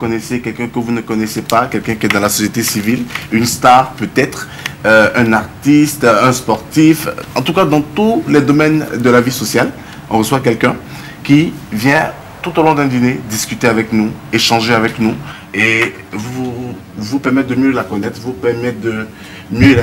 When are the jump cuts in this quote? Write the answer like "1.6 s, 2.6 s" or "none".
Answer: none